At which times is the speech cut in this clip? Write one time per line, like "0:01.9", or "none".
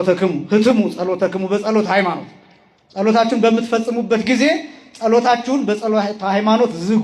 none

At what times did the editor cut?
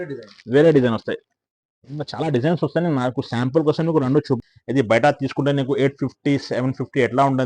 0:04.4

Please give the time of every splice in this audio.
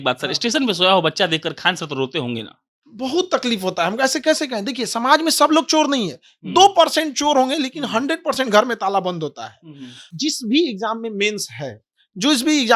0:10.1

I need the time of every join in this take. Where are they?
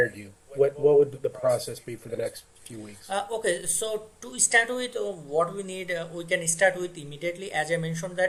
none

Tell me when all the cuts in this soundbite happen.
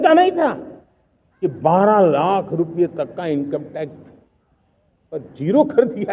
none

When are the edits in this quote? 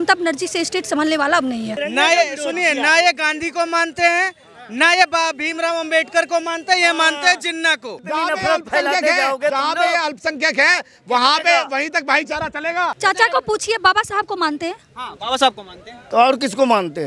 0:01.8
0:07.9

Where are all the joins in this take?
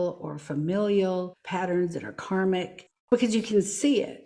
0:01.4
0:03.0

